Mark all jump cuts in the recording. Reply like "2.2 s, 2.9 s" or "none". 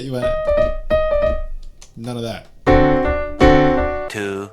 2.6 s